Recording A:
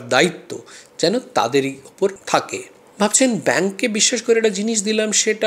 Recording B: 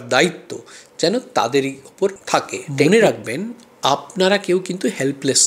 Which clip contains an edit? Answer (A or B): B